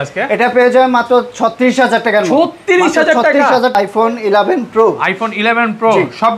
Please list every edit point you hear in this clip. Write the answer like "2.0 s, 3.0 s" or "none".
3.7 s